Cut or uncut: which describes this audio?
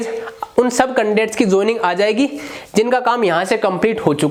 uncut